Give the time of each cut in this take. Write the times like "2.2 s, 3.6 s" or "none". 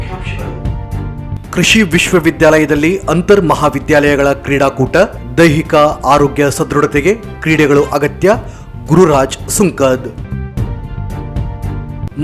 1.3 s